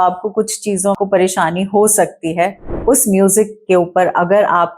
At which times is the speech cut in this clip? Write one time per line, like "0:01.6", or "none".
0:01.0
0:02.6